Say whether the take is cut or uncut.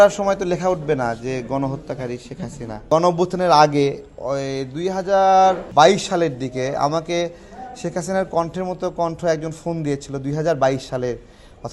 cut